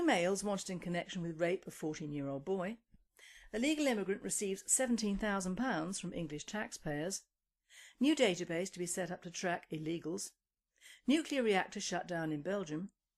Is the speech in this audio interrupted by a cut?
yes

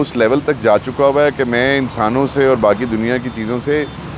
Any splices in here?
no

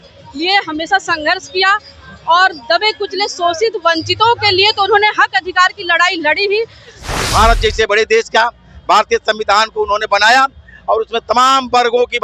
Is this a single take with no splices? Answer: no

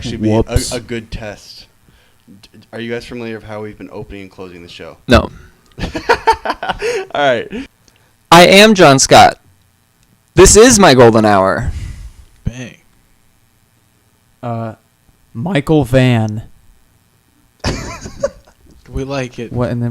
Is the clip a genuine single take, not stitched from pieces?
no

